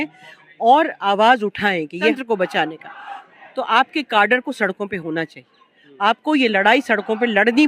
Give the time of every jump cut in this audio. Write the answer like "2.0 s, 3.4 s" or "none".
2.1 s